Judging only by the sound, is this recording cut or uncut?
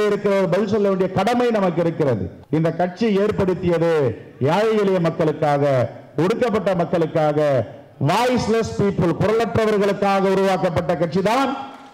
cut